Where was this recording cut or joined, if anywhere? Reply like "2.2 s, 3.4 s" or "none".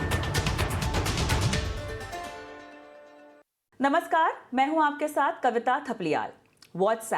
2.6 s